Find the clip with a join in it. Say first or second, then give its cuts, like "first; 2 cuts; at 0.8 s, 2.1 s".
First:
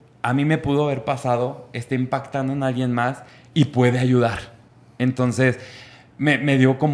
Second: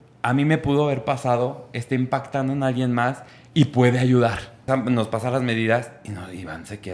second; 1 cut; at 4.6 s